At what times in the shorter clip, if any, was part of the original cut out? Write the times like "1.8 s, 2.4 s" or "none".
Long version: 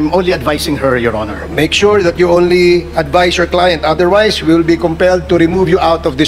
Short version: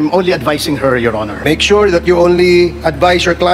1.3 s